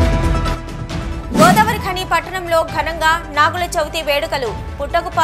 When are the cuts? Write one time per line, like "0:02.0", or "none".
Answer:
0:01.1